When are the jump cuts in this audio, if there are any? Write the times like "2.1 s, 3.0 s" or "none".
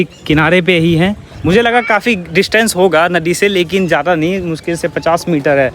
none